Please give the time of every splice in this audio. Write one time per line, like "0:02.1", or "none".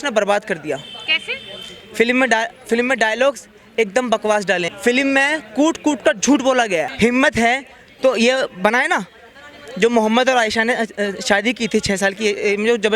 0:04.7
0:06.9